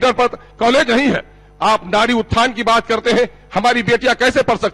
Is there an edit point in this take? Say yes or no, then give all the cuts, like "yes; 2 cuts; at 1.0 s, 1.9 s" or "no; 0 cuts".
no; 0 cuts